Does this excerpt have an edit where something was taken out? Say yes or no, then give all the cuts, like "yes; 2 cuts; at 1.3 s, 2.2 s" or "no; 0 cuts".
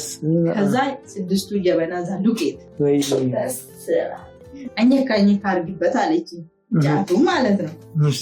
yes; 2 cuts; at 2.6 s, 4.6 s